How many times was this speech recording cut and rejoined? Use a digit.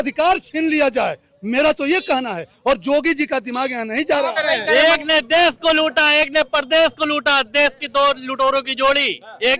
1